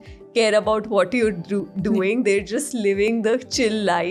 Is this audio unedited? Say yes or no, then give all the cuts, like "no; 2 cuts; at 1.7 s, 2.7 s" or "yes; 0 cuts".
yes; 0 cuts